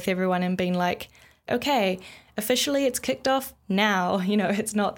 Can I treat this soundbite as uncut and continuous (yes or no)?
no